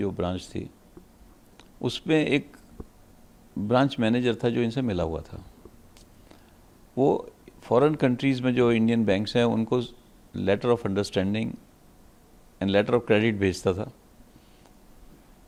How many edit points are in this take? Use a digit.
0